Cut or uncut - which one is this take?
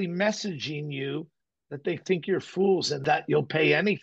cut